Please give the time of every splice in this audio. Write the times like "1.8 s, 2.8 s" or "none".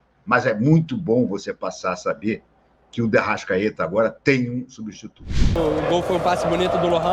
5.6 s